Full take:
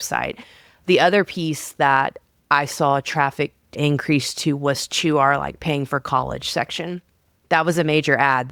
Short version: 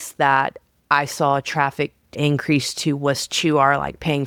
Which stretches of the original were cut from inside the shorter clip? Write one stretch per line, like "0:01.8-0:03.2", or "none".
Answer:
none